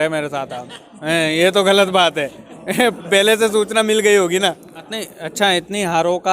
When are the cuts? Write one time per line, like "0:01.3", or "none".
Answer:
0:04.7